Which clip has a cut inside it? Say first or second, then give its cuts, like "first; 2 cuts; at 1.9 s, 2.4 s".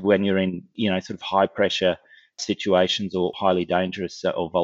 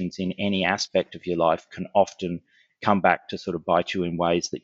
first; 1 cut; at 3.3 s